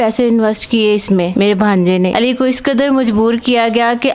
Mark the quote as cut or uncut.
cut